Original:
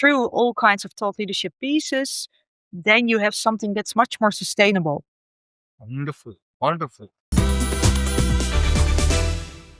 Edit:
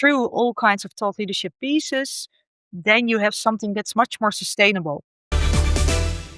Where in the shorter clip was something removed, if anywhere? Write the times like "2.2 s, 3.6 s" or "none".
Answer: 5.3 s